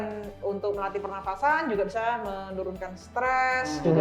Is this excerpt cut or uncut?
uncut